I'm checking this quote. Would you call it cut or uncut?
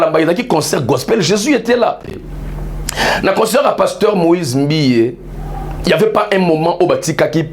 cut